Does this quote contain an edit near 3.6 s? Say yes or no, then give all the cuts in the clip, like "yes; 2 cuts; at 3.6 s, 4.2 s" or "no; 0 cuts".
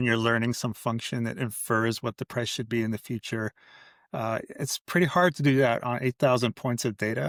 no; 0 cuts